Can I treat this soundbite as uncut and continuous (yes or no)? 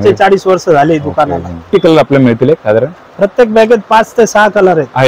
no